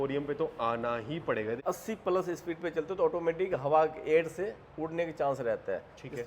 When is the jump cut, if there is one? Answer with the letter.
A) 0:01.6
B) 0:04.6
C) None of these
A